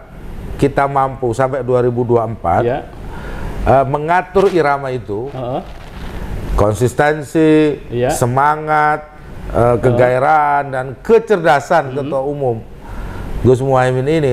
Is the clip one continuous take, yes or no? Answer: yes